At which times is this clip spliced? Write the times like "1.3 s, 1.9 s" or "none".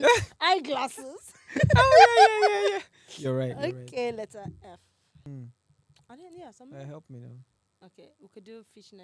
5.3 s